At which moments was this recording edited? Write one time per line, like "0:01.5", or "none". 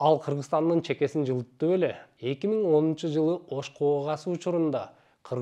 0:02.0

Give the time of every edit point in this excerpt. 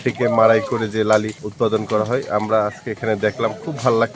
0:01.4

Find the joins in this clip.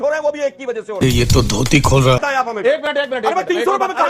0:02.2

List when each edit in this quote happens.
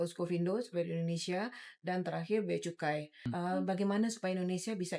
0:03.3

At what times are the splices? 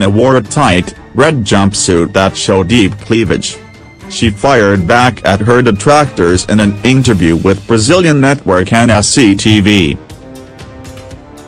0:10.0

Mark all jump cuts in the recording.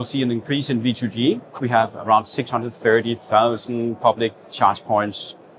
0:01.5

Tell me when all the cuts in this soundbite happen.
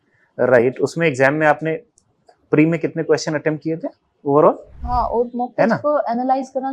0:04.8

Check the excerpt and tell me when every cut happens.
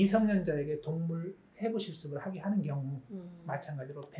none

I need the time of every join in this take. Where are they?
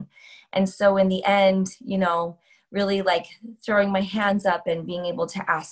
none

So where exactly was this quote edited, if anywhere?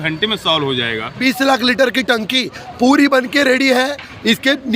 0:01.2

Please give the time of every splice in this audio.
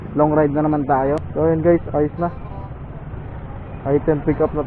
0:01.3

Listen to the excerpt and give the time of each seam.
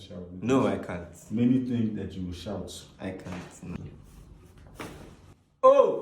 0:03.8

